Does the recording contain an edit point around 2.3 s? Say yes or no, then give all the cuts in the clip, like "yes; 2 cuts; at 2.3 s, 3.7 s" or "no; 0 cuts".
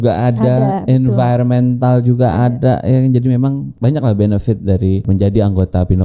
no; 2 cuts; at 3.7 s, 5.1 s